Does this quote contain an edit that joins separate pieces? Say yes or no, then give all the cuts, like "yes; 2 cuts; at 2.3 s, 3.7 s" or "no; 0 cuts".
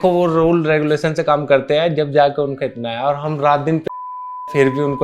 no; 0 cuts